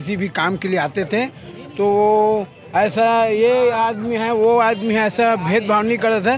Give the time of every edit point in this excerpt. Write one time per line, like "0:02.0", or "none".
none